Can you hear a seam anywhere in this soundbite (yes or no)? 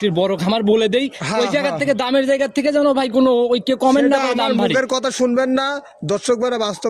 no